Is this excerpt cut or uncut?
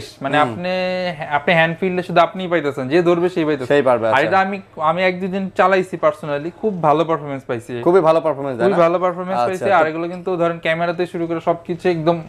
uncut